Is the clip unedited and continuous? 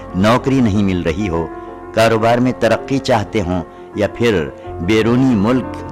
yes; 0 cuts

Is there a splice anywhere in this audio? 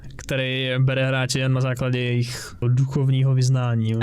yes; 1 cut; at 2.6 s

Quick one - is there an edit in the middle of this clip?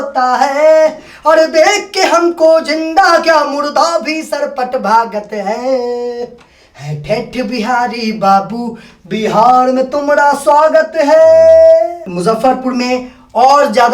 yes; 1 cut; at 12.0 s

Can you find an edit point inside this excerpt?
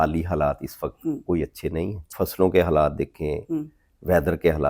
yes; 1 cut; at 2.0 s

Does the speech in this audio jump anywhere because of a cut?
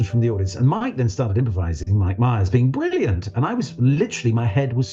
no; 0 cuts

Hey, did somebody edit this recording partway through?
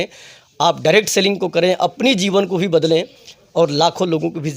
no; 0 cuts

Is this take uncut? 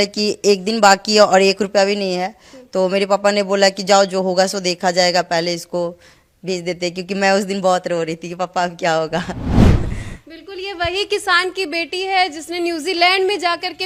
yes; 0 cuts

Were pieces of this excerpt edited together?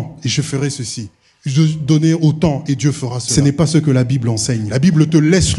yes; 2 cuts; at 3.3 s, 4.7 s

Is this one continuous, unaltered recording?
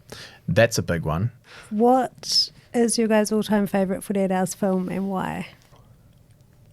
no; 1 cut; at 1.4 s

